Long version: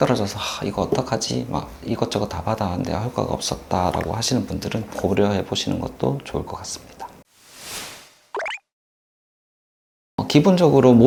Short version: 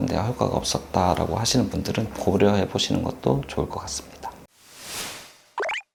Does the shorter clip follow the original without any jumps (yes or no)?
yes